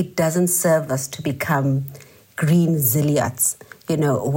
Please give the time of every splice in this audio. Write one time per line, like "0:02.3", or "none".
none